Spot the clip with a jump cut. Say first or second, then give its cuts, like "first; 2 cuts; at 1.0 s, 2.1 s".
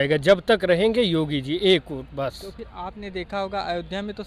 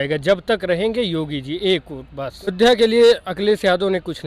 second; 1 cut; at 2.5 s